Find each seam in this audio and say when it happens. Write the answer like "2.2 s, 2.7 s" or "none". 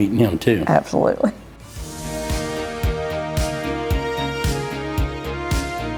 1.5 s